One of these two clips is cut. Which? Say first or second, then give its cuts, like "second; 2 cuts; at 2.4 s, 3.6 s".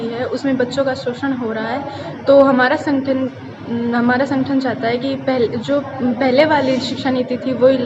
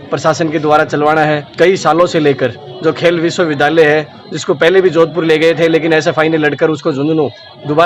second; 1 cut; at 1.5 s